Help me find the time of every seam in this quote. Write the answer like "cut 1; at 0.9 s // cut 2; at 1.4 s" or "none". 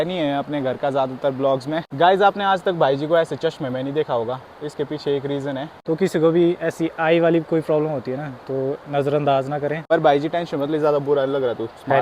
cut 1; at 1.9 s // cut 2; at 5.7 s // cut 3; at 9.8 s